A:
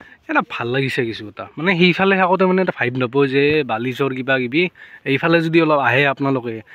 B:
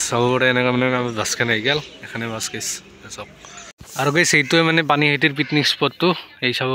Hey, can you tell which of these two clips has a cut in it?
B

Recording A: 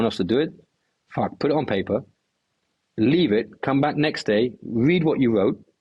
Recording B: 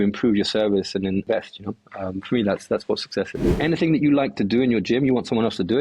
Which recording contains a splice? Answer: B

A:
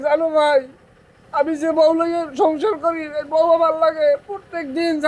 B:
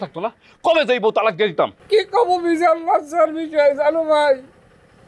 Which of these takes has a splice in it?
B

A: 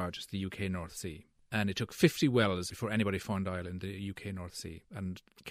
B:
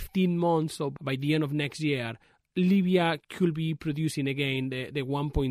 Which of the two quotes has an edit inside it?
B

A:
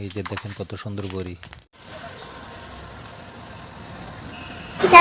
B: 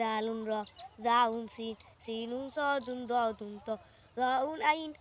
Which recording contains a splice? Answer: A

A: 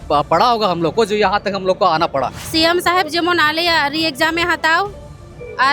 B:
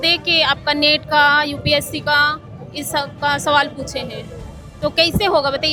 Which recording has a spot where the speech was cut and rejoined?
A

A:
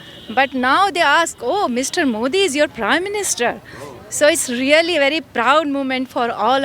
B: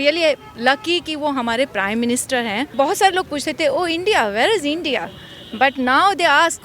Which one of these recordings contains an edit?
B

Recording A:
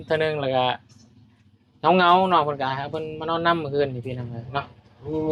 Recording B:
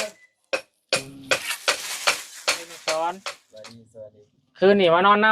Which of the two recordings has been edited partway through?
B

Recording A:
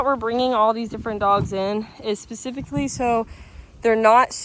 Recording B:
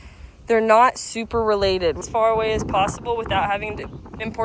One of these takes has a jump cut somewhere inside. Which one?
B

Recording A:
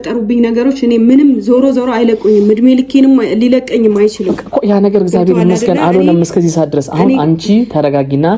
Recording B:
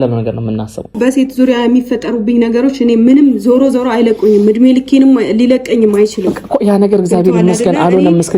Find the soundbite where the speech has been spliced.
B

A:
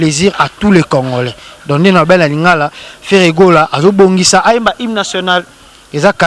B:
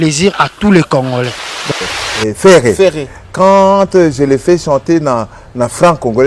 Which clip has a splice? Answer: B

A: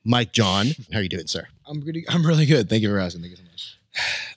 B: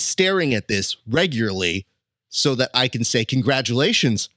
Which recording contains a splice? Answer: A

